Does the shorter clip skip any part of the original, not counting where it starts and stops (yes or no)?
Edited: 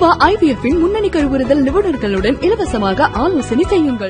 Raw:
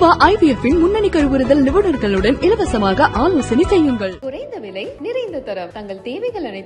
no